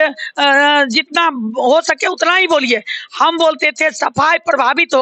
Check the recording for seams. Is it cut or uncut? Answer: uncut